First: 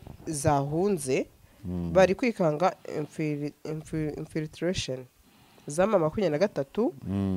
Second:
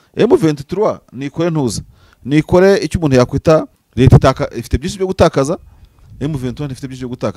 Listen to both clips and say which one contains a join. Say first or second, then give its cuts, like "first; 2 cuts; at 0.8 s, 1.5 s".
second; 1 cut; at 3.8 s